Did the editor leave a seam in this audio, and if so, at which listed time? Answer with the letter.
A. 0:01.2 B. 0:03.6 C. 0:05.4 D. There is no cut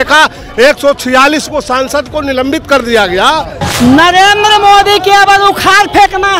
B